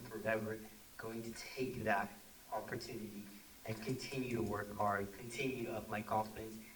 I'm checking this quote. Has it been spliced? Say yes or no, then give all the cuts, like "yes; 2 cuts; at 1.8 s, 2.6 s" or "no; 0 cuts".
no; 0 cuts